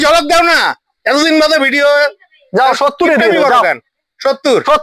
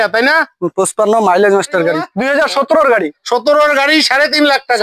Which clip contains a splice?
second; 1 cut; at 2.1 s

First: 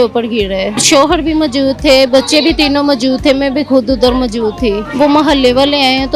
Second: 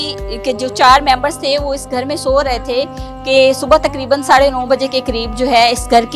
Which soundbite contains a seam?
first; 2 cuts; at 0.8 s, 4.9 s

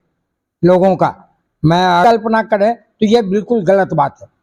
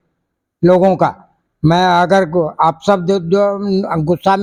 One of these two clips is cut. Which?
first; 1 cut; at 2.0 s

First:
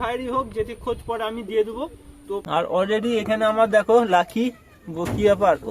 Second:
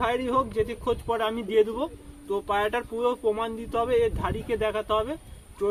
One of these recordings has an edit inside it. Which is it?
first; 1 cut; at 2.4 s

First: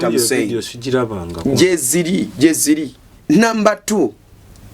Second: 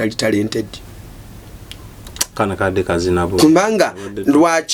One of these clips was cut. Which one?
first; 1 cut; at 3.1 s

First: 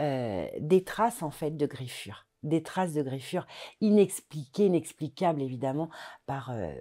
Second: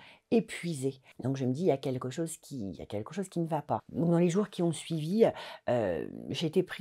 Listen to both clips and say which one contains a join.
second; 2 cuts; at 1.1 s, 3.9 s

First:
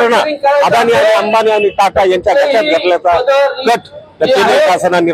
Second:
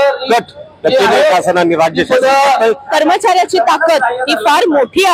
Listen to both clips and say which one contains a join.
second; 1 cut; at 2.8 s

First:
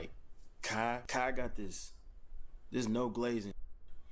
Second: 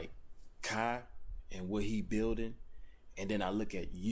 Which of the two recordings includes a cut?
first; 1 cut; at 1.0 s

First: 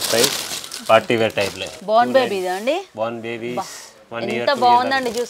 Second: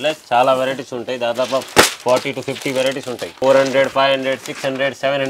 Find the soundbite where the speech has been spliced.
second; 1 cut; at 3.3 s

